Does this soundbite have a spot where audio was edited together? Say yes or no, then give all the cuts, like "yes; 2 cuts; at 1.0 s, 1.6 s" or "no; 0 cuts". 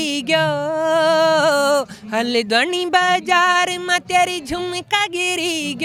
no; 0 cuts